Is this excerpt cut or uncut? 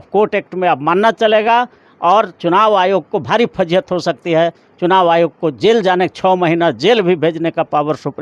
uncut